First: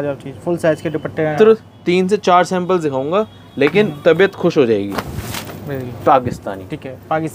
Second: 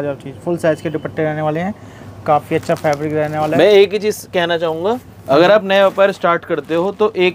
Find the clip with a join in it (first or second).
first